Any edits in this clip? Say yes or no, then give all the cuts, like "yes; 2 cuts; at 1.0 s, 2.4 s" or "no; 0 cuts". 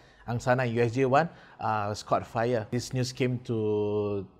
yes; 1 cut; at 2.7 s